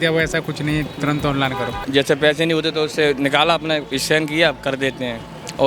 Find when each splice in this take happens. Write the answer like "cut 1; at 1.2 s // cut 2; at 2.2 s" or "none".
cut 1; at 1.8 s